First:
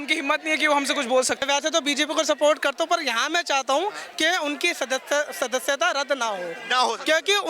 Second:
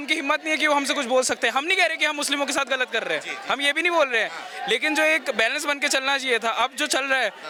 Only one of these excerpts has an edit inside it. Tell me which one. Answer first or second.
first